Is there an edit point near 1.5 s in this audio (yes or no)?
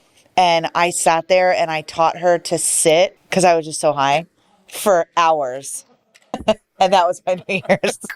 no